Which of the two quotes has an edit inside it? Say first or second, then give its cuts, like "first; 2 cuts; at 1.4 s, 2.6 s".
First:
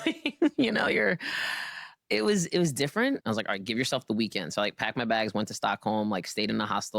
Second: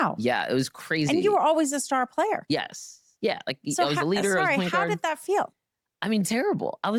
first; 1 cut; at 3.2 s